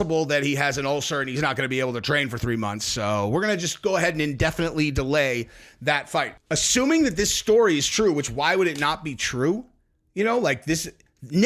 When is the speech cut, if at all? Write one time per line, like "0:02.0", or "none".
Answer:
0:06.4